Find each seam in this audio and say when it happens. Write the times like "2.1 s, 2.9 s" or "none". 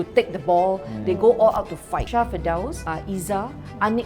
2.1 s, 2.8 s